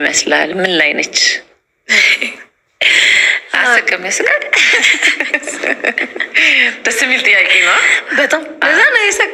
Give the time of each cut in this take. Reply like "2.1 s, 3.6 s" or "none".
none